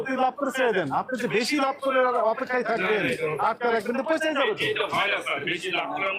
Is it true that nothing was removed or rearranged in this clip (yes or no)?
yes